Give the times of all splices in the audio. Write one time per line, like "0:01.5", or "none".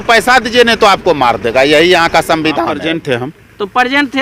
0:02.8